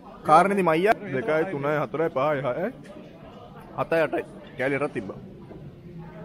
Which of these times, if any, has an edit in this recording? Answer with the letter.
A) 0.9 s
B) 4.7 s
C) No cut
A